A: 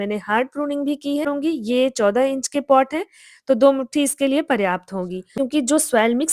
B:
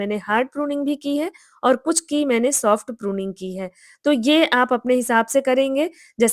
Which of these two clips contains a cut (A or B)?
A